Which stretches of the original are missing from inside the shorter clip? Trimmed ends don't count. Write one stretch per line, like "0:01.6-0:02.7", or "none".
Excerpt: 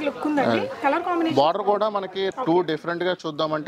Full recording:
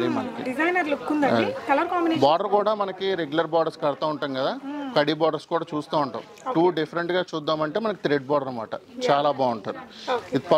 0:03.2-0:06.4